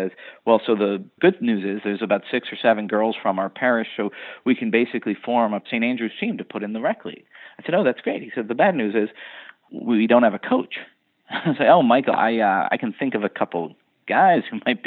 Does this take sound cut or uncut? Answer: cut